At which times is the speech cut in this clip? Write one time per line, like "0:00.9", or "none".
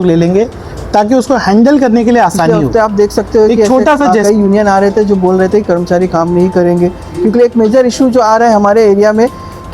0:02.6